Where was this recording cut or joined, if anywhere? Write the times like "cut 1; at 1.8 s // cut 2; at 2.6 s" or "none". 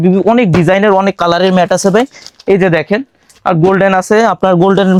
none